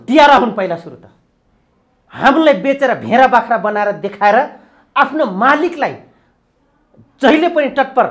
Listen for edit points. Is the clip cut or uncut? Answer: uncut